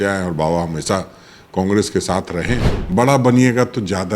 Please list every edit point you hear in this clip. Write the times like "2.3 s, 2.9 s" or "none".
2.7 s